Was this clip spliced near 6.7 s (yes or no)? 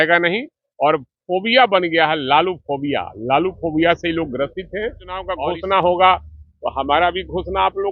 no